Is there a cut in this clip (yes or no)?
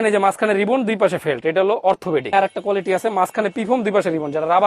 yes